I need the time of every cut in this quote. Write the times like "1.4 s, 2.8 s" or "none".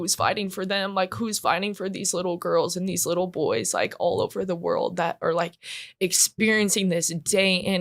none